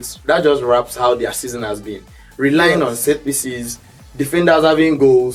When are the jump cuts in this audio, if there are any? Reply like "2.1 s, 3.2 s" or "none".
none